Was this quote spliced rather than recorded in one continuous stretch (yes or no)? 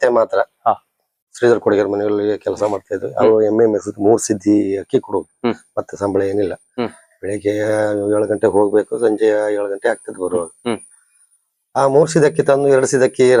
no